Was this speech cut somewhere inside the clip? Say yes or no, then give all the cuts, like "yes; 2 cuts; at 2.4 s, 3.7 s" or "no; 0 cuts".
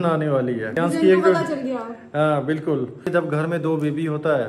yes; 2 cuts; at 0.8 s, 3.1 s